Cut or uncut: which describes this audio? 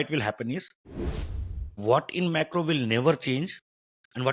cut